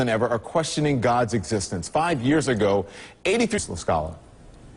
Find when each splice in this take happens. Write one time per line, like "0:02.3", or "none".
none